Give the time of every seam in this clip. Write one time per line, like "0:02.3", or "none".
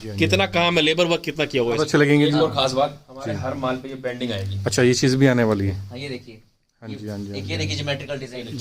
0:01.8
0:05.7